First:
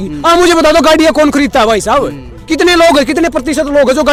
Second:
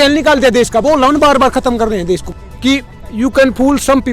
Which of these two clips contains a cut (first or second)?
second